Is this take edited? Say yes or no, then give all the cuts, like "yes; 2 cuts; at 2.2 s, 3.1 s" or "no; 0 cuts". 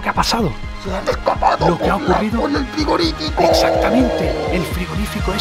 no; 0 cuts